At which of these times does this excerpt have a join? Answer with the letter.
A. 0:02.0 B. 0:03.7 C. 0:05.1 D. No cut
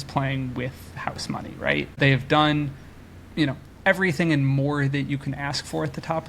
A